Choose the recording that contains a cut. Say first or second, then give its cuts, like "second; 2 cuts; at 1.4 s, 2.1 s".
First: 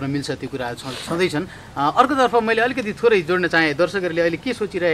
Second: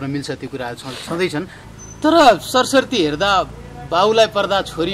second; 1 cut; at 1.6 s